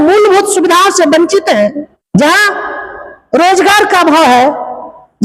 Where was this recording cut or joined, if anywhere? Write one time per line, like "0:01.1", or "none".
0:02.0